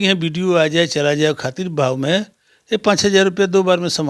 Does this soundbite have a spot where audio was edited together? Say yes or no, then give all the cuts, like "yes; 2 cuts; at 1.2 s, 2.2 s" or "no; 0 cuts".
no; 0 cuts